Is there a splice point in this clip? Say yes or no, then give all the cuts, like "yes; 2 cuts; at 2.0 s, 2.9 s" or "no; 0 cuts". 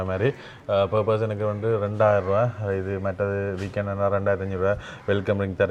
no; 0 cuts